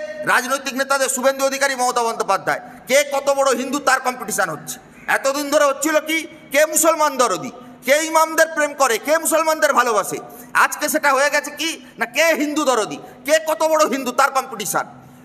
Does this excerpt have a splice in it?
no; 0 cuts

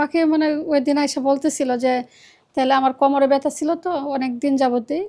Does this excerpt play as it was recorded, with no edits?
yes; 0 cuts

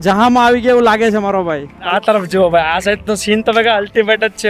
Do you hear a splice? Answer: yes; 1 cut; at 1.7 s

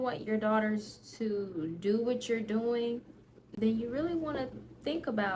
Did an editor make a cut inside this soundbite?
no; 0 cuts

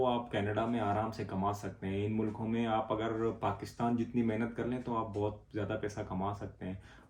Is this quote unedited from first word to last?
yes; 0 cuts

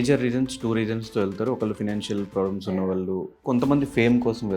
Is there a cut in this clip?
yes; 1 cut; at 3.4 s

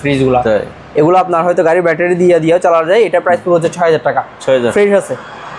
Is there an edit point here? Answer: no; 0 cuts

